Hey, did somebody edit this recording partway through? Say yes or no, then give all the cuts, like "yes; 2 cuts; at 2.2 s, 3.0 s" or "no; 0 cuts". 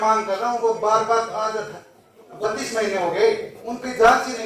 no; 0 cuts